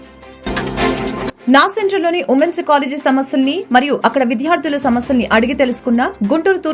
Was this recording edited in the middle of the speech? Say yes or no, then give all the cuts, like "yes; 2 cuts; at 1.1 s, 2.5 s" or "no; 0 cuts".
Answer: no; 0 cuts